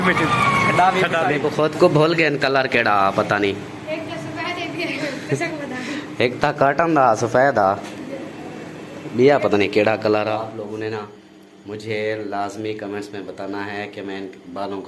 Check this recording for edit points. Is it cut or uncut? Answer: cut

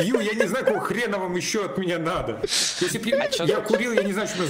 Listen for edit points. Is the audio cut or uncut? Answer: uncut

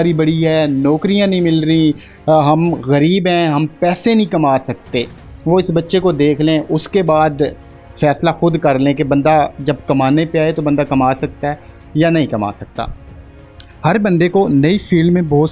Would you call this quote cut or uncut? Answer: uncut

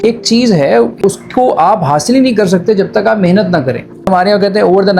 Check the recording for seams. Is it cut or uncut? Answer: cut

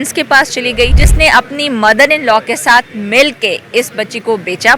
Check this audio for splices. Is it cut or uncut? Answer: cut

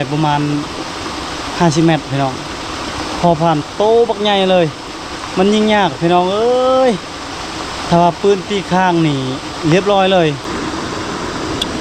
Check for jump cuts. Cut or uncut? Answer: cut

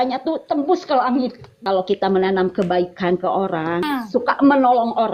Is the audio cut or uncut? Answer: cut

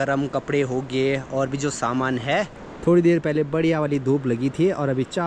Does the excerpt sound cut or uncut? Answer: cut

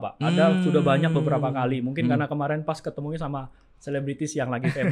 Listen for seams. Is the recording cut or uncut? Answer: uncut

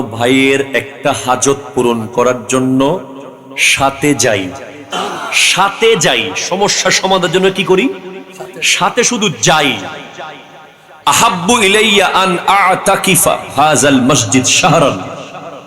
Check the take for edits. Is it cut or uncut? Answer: cut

